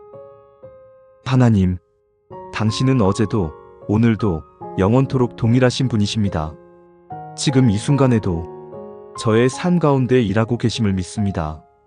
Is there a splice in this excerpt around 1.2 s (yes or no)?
yes